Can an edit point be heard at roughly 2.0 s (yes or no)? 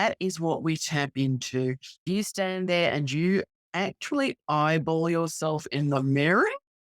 yes